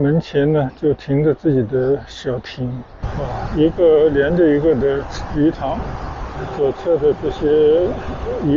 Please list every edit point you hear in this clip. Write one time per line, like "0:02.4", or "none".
0:03.0